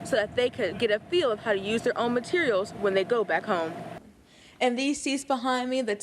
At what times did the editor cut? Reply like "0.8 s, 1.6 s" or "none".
3.9 s